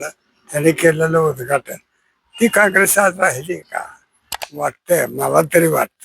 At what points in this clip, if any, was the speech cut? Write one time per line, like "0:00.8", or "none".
0:04.3